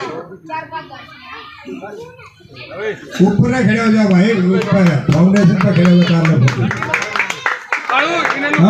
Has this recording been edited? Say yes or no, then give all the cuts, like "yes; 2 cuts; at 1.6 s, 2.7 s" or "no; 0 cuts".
no; 0 cuts